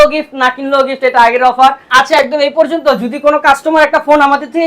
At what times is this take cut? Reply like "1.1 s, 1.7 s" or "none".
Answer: 1.8 s